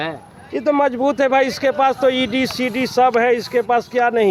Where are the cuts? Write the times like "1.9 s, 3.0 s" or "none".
none